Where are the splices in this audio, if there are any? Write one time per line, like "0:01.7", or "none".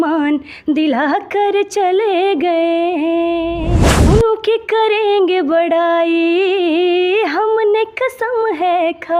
0:03.7